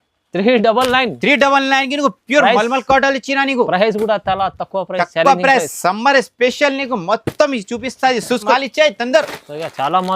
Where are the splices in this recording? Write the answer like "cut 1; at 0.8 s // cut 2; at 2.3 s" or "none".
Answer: cut 1; at 8.5 s